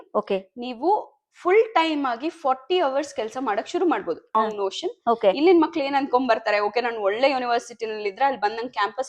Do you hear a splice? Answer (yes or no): yes